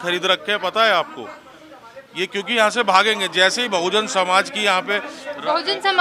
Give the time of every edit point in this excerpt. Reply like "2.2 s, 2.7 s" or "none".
none